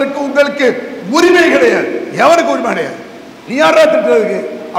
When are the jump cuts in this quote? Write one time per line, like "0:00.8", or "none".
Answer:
none